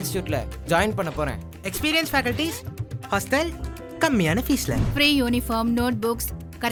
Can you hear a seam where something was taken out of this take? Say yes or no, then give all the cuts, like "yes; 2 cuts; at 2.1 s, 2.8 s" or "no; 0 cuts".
no; 0 cuts